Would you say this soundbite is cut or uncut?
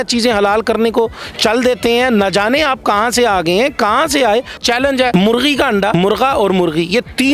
cut